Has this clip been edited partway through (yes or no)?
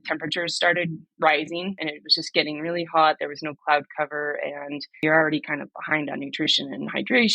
yes